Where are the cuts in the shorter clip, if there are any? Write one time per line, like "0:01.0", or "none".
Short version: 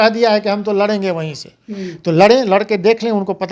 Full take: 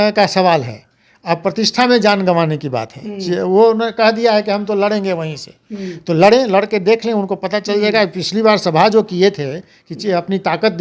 none